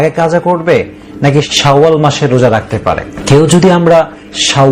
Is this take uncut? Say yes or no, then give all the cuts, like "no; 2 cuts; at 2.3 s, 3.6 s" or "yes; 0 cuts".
no; 2 cuts; at 1.5 s, 3.1 s